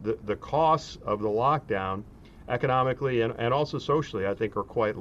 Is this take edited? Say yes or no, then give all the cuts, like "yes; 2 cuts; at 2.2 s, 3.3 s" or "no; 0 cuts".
no; 0 cuts